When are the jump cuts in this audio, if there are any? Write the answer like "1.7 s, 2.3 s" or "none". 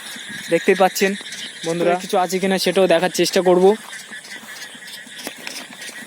2.0 s